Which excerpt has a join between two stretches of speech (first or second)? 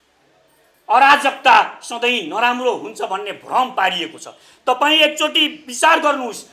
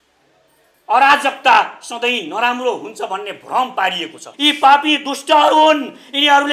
second